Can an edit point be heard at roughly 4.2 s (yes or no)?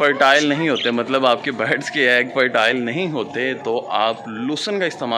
no